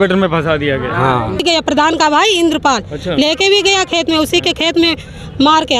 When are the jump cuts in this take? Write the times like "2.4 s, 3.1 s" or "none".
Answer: 1.4 s